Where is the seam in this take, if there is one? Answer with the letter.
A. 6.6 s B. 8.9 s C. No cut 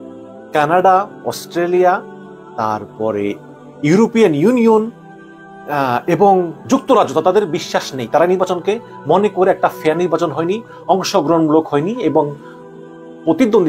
C